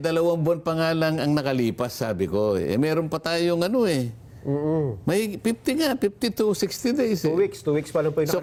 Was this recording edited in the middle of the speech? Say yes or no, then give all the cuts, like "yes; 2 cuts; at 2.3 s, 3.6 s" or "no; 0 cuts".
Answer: no; 0 cuts